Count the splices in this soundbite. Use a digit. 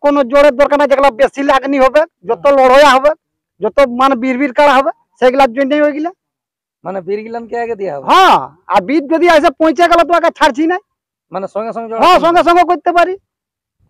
0